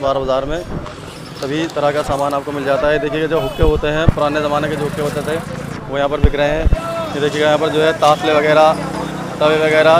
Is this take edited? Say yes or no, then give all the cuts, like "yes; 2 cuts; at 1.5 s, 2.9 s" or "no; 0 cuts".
no; 0 cuts